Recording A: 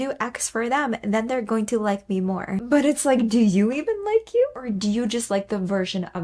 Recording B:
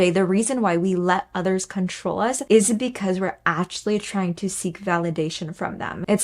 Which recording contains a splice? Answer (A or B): B